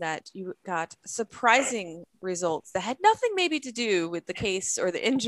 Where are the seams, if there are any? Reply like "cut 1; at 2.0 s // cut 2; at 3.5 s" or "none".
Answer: none